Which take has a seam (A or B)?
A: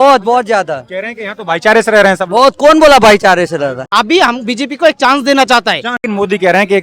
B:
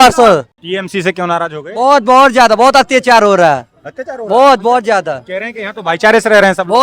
A